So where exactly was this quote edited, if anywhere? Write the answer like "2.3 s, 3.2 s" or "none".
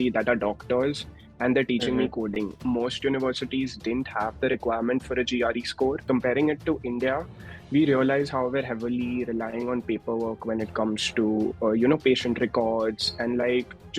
2.6 s, 6.0 s